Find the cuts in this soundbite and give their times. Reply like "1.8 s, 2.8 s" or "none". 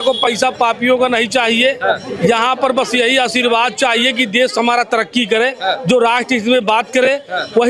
none